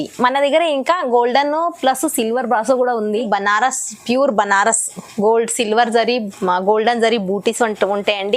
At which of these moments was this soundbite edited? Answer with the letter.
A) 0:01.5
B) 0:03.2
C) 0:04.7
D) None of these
B